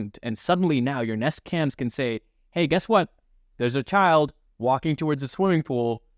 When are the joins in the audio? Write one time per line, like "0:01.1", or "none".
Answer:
none